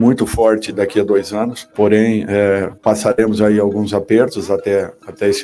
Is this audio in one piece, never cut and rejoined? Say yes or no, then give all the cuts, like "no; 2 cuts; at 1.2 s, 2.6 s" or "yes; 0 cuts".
no; 2 cuts; at 1.6 s, 2.7 s